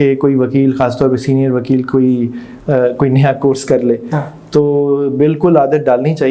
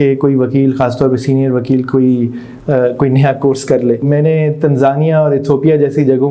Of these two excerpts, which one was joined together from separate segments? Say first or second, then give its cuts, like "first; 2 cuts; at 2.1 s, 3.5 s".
second; 1 cut; at 4.0 s